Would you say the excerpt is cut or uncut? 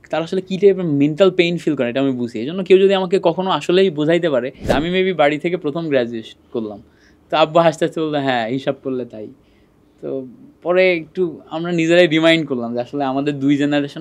cut